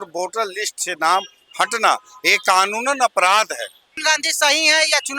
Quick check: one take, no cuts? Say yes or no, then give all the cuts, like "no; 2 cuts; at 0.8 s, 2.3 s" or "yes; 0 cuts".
no; 1 cut; at 4.0 s